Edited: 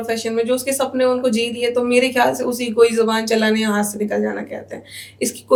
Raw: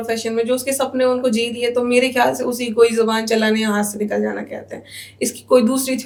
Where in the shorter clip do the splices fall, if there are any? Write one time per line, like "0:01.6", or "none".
none